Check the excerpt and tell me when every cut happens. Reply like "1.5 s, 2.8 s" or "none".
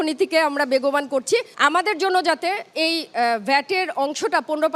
1.5 s